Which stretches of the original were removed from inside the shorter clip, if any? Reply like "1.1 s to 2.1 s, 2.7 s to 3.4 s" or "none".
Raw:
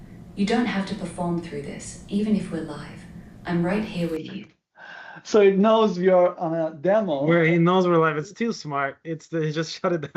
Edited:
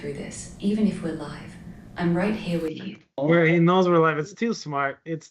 4.7 s to 7.2 s